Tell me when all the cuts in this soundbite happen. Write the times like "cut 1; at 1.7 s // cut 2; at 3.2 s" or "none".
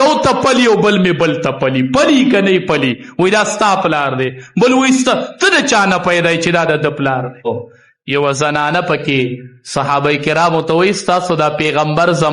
cut 1; at 7.4 s